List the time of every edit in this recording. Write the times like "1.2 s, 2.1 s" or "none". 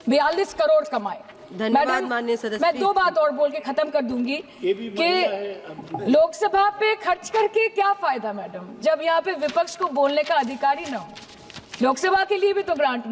none